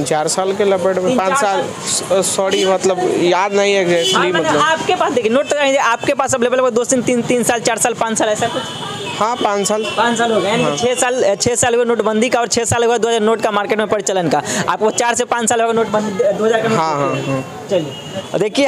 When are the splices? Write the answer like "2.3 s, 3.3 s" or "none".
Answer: none